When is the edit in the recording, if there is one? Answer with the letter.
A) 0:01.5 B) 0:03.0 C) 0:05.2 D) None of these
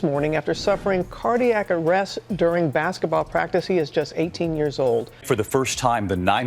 C